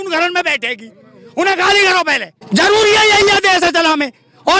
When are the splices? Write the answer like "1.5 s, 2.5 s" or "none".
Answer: 2.3 s